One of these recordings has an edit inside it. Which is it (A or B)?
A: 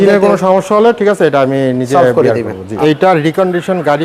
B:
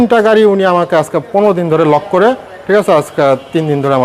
A